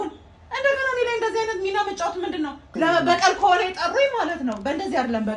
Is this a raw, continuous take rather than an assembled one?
no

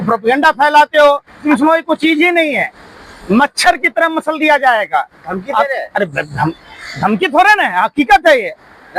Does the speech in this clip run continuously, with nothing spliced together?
no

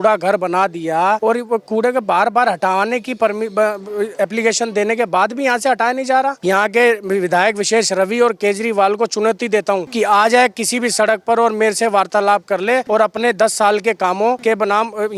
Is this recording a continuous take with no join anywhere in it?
no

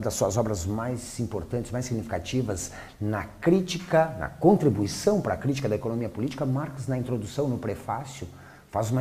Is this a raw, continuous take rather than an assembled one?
yes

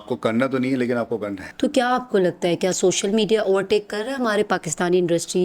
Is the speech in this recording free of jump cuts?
no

